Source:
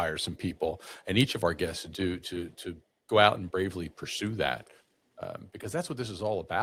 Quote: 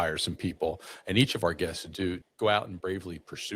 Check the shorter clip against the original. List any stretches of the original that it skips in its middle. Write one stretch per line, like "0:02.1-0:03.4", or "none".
0:02.2-0:03.0